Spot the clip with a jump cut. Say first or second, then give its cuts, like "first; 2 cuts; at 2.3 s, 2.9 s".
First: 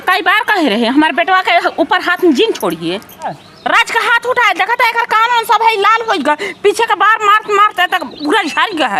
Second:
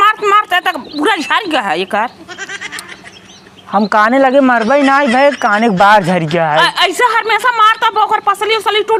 first; 1 cut; at 3.5 s